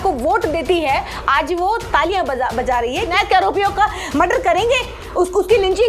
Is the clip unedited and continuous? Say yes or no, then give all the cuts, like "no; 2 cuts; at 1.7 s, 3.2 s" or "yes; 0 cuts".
no; 1 cut; at 3.1 s